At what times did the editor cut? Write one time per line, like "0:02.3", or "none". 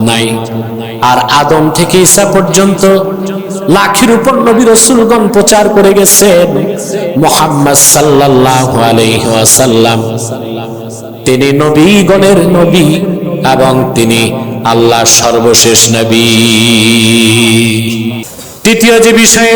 0:18.3